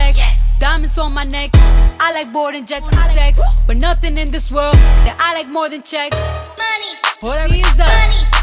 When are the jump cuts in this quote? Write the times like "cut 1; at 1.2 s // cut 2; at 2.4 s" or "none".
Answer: cut 1; at 3.0 s // cut 2; at 7.5 s